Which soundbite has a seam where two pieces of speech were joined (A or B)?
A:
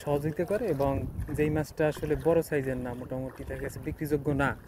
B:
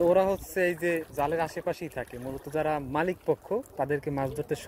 B